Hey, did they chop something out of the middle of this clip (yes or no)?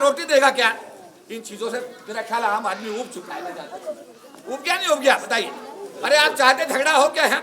no